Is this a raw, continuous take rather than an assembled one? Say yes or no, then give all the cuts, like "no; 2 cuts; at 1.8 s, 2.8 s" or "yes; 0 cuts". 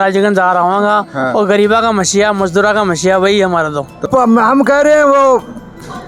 no; 1 cut; at 4.1 s